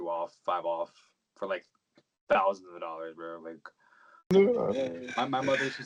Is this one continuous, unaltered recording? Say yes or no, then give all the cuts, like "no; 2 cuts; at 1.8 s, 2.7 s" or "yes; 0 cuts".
no; 1 cut; at 4.3 s